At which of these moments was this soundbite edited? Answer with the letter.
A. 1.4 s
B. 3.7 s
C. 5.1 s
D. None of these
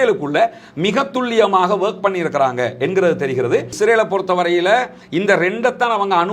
B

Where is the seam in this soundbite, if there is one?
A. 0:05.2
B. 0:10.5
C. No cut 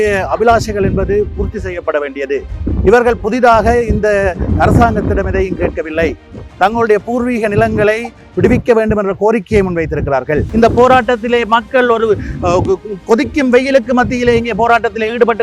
B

